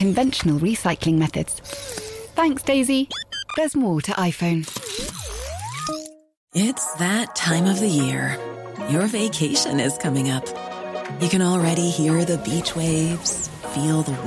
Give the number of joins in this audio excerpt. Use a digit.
0